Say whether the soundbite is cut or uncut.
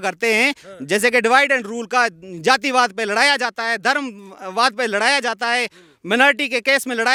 uncut